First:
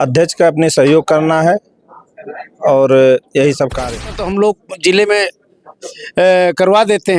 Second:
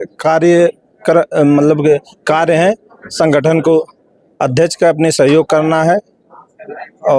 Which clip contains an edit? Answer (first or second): first